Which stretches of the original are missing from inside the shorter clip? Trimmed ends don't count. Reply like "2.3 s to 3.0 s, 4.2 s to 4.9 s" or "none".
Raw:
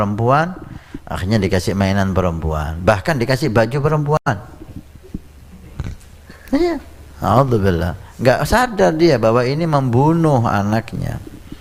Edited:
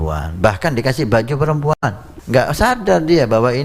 4.5 s to 8.0 s